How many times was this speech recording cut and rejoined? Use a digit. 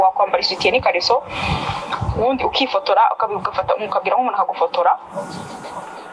0